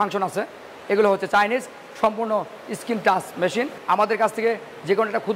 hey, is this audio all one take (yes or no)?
no